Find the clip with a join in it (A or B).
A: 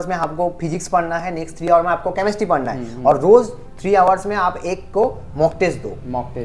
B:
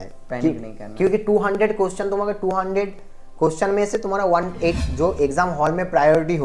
B